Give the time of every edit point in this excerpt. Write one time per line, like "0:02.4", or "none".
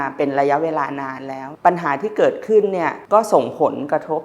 0:01.5
0:03.0